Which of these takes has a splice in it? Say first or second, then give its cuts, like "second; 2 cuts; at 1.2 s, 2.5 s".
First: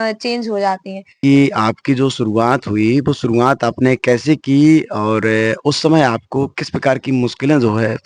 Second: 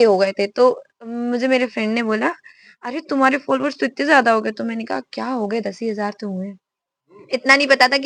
first; 1 cut; at 1.2 s